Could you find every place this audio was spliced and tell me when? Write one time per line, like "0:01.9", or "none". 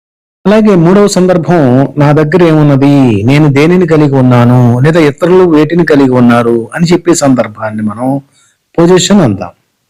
none